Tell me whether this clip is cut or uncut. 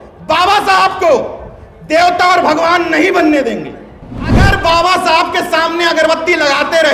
cut